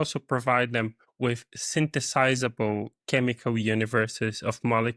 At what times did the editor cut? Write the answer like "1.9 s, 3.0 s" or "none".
1.0 s